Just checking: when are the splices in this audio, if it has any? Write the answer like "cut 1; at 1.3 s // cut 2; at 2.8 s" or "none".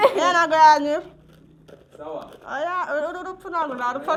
none